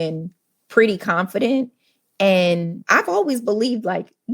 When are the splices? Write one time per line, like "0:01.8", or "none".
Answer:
0:02.8